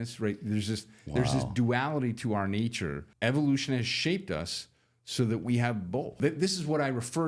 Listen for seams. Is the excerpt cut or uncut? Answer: cut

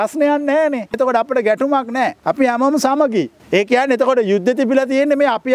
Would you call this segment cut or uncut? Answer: cut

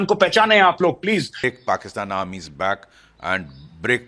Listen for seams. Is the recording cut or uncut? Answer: cut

